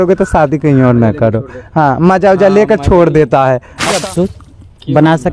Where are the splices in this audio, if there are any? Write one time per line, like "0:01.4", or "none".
0:04.0